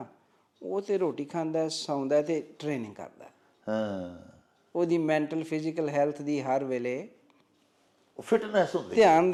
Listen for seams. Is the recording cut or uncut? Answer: uncut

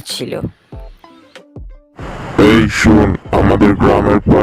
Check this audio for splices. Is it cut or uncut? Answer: cut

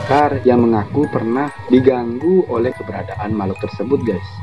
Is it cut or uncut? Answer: cut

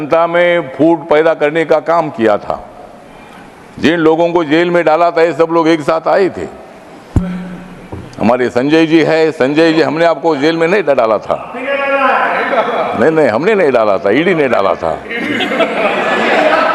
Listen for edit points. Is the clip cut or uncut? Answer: uncut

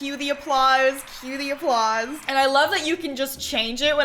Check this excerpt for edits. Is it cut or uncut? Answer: uncut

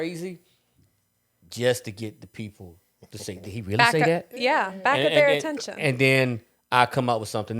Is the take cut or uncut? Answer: uncut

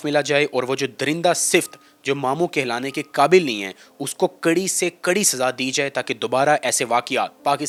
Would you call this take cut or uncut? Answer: uncut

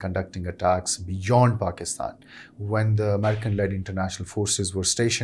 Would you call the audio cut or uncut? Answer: uncut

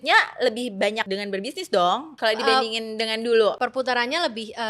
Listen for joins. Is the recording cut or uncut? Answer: cut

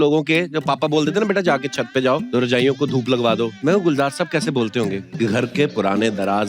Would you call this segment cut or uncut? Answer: cut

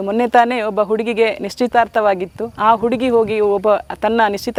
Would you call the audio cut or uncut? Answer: uncut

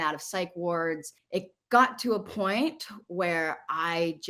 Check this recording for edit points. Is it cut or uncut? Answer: cut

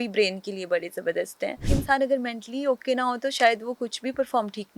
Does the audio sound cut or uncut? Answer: cut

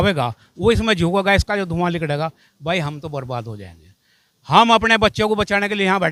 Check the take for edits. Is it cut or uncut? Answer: uncut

